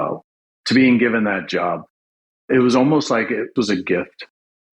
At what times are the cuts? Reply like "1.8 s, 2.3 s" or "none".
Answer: 3.5 s

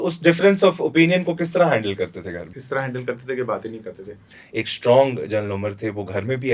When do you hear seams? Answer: 2.5 s, 4.4 s

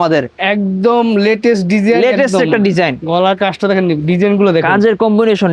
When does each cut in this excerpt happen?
none

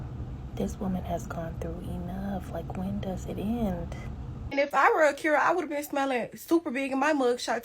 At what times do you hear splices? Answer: 4.7 s

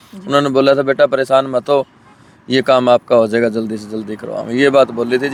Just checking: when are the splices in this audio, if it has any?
none

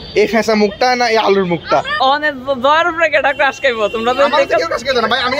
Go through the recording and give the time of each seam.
1.9 s

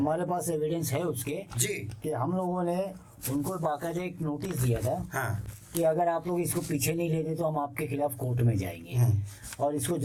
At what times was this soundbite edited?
none

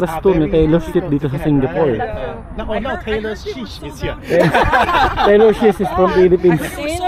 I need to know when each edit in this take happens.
none

